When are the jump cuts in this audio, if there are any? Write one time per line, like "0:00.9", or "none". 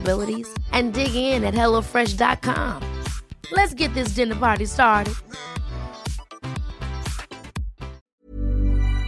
0:08.2